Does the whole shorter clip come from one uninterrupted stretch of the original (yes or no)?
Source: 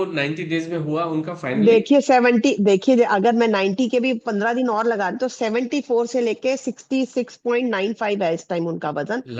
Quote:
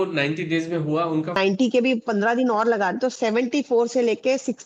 no